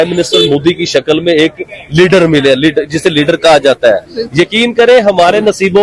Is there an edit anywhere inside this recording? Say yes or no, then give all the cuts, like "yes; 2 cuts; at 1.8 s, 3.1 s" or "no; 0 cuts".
no; 0 cuts